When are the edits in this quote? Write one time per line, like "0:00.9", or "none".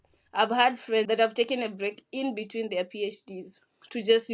0:01.1